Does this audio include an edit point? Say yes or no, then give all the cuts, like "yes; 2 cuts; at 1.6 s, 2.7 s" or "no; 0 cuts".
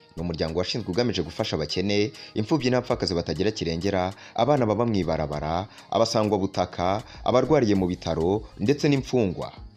no; 0 cuts